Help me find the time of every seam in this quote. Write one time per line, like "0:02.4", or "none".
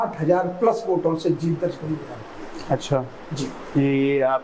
none